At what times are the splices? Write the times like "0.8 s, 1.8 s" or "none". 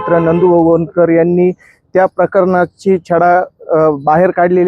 none